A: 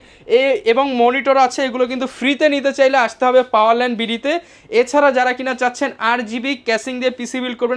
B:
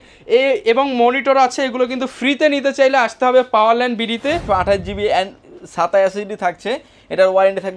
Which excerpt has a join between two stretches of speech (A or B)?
B